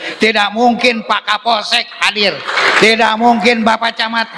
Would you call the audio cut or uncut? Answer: uncut